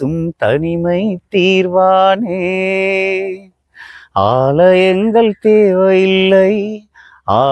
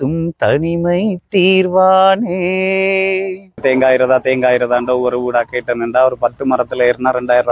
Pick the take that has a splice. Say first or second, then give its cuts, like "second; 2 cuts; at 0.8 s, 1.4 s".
second; 1 cut; at 3.6 s